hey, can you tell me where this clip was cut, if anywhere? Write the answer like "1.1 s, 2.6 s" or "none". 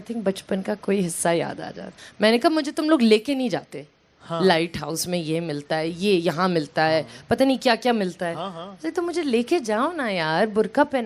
1.9 s